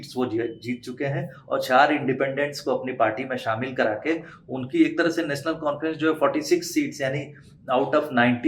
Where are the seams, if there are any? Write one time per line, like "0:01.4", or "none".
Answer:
none